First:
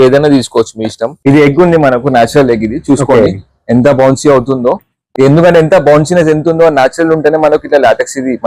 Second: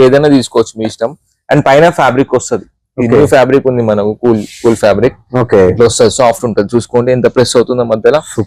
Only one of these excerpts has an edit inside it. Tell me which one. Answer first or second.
first